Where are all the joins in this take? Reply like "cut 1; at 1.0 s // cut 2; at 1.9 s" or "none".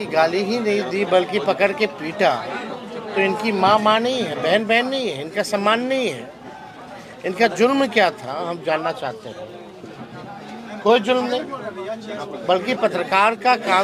none